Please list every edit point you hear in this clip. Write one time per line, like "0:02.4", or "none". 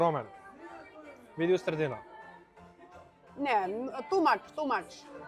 none

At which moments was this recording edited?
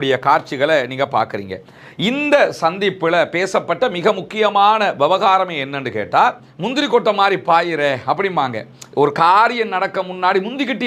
0:06.4

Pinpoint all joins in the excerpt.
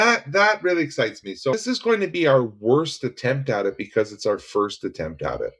0:01.5

